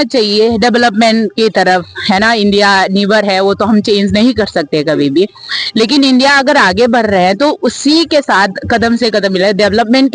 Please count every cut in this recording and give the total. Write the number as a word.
zero